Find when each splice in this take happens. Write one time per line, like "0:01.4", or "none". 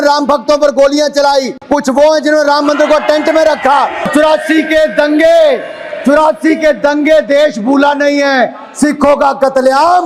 0:01.6
0:04.1